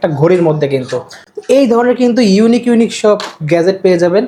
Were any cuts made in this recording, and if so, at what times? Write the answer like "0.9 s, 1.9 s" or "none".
none